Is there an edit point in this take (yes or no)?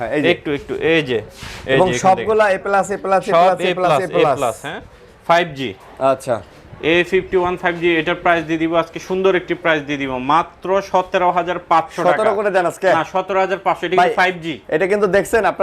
no